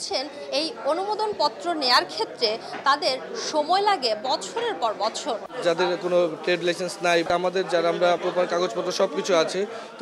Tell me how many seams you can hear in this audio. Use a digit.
3